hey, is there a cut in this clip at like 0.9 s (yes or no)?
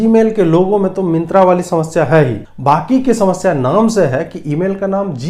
no